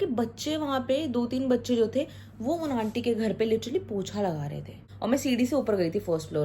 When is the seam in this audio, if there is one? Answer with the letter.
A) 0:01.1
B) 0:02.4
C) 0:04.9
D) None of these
C